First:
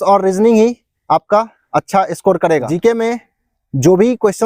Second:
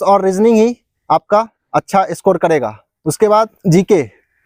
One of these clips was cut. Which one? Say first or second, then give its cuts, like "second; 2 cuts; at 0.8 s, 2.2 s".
first; 1 cut; at 2.7 s